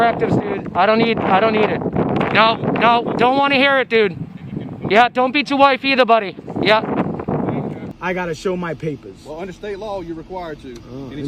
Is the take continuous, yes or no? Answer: no